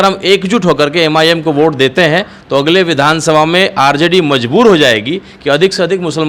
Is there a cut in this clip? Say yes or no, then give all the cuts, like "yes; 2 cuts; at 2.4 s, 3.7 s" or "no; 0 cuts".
no; 0 cuts